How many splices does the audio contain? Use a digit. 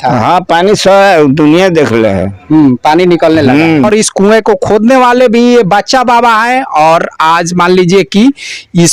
1